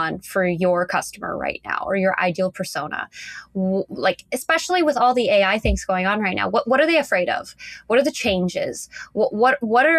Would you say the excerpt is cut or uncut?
uncut